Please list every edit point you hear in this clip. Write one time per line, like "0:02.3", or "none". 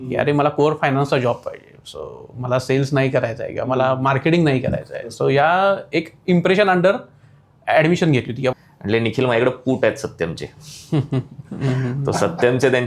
0:08.5